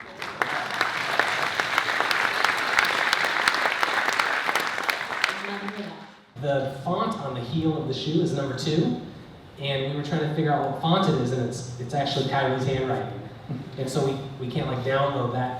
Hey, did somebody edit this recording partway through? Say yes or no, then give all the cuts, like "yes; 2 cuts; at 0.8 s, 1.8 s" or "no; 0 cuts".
yes; 1 cut; at 6.3 s